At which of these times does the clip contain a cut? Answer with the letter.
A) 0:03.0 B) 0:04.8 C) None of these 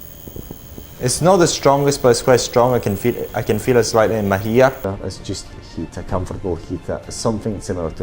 B